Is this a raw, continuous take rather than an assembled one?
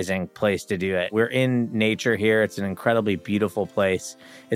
no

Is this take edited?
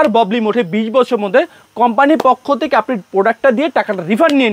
no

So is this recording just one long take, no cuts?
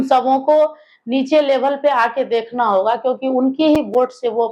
yes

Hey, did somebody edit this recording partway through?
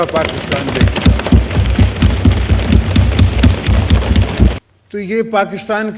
yes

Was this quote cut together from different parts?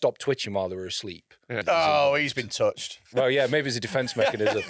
yes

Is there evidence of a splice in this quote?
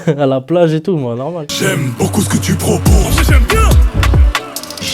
yes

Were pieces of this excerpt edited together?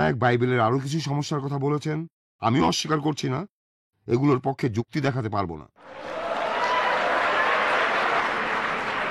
yes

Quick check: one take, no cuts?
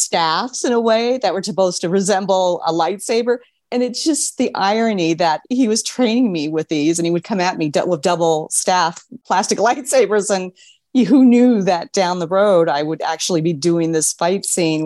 yes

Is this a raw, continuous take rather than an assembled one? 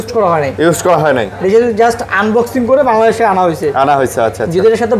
yes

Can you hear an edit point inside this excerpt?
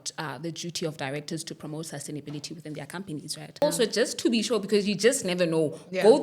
yes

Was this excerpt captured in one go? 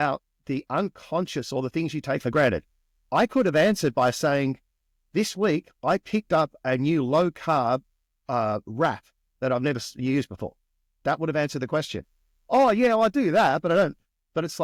yes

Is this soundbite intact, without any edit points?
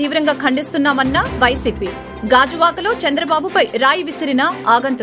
yes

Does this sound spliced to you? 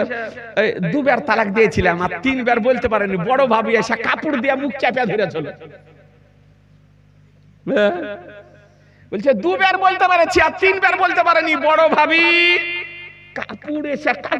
no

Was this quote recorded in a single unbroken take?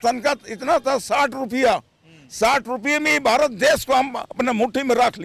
yes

